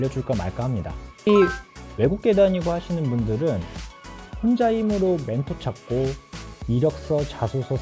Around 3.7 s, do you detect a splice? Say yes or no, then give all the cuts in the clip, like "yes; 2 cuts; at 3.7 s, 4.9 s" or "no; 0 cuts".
no; 1 cut; at 1.3 s